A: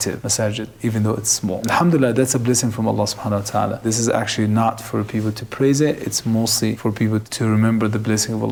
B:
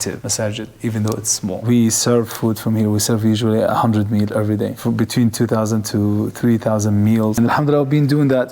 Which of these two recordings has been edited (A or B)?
B